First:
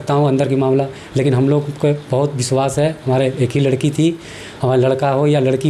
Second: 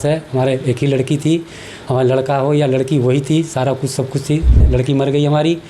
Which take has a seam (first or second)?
second